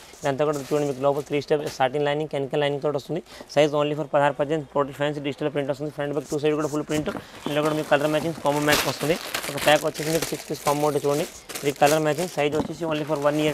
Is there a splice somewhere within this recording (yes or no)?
no